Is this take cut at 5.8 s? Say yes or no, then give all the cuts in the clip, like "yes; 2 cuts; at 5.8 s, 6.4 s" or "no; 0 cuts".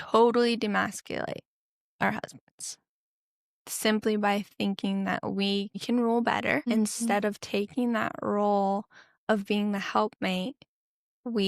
yes; 2 cuts; at 5.8 s, 6.6 s